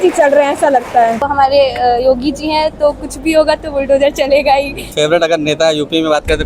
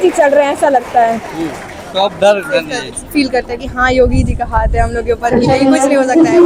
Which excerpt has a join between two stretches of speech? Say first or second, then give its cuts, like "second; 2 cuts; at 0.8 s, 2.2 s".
first; 2 cuts; at 1.3 s, 4.9 s